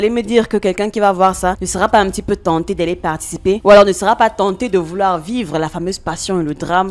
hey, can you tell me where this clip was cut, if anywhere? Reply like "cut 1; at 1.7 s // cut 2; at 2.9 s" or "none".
none